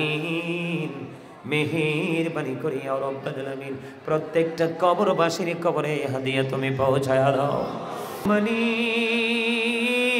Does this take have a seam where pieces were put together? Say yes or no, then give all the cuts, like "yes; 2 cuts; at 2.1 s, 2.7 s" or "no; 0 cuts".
yes; 1 cut; at 8.2 s